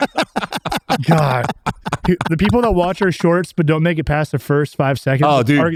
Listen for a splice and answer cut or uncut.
uncut